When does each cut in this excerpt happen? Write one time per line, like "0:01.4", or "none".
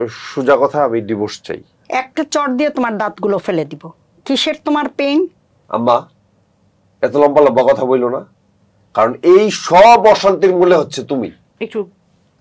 0:05.6